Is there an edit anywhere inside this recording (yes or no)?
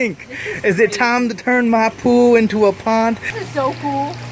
yes